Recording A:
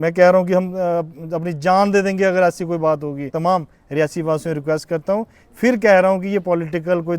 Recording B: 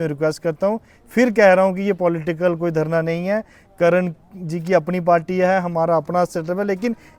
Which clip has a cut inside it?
A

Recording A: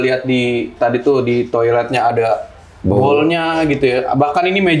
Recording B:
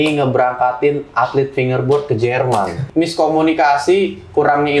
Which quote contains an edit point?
B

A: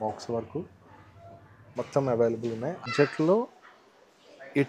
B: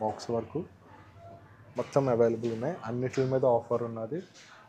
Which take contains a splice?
A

